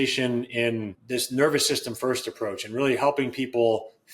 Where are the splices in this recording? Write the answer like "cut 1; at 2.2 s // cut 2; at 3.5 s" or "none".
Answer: cut 1; at 1.0 s

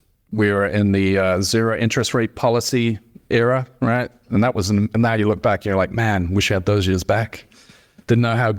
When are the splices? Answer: none

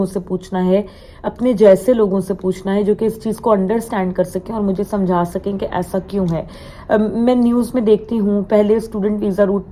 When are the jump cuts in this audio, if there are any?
none

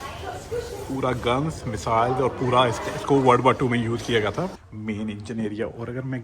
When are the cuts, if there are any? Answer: cut 1; at 4.5 s

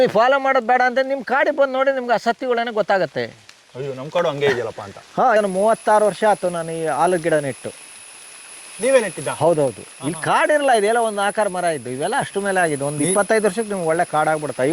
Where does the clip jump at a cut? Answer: cut 1; at 5.4 s

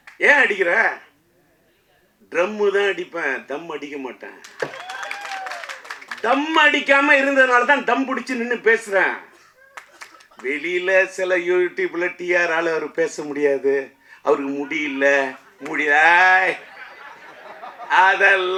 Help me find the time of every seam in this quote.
none

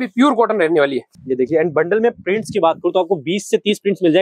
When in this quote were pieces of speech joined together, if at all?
cut 1; at 1.0 s

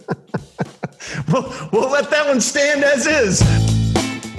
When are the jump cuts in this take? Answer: cut 1; at 3.4 s

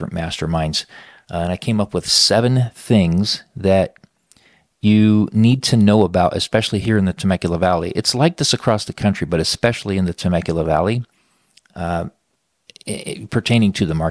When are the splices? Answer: none

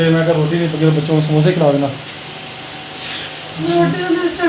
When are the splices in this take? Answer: none

